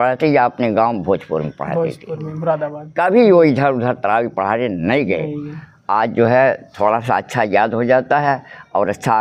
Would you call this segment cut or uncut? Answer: uncut